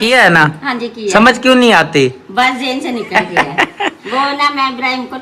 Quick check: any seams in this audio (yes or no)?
no